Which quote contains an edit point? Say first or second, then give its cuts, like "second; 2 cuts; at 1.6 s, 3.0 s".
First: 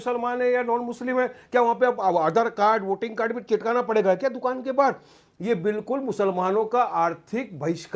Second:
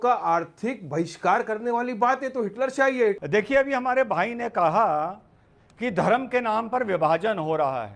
second; 1 cut; at 2.9 s